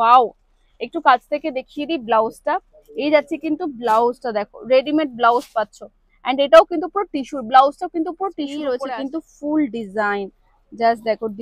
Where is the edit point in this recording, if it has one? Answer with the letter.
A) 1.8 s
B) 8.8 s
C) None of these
B